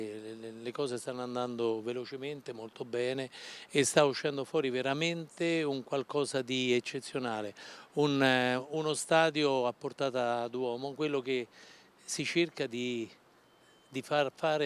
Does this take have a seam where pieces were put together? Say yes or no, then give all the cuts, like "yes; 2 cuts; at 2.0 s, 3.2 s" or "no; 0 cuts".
yes; 1 cut; at 6.9 s